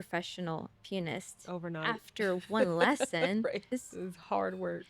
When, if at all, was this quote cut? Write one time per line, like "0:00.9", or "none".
0:03.7

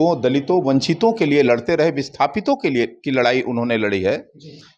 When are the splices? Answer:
none

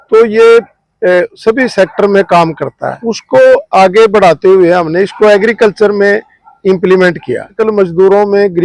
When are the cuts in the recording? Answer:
0:03.1
0:07.6

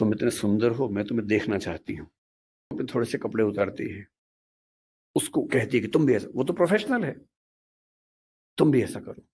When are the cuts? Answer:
0:02.8

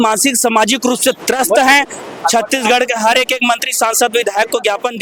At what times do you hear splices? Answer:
none

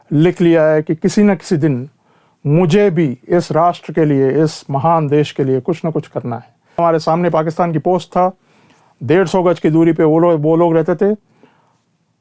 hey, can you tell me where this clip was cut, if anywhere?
0:06.8

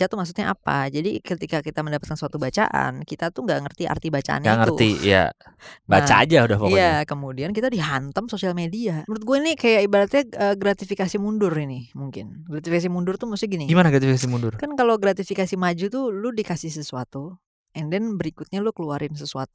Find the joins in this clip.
0:09.1

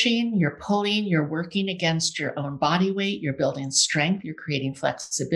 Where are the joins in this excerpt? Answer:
none

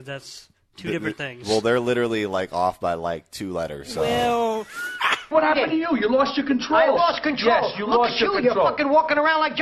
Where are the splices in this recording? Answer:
0:05.3

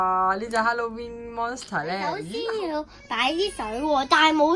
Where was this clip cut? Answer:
0:02.2

